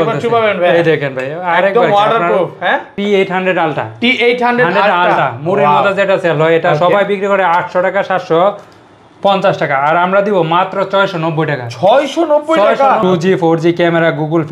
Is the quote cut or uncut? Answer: cut